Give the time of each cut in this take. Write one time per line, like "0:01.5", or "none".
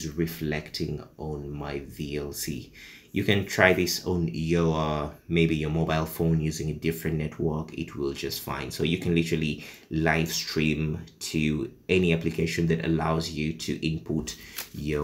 none